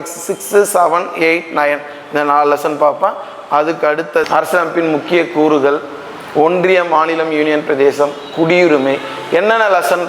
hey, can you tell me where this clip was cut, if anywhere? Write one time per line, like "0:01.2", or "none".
0:04.3